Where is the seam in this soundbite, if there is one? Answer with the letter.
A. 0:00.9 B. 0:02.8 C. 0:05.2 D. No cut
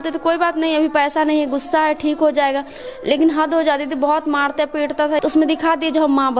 C